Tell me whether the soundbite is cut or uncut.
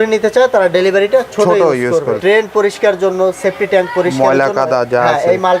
cut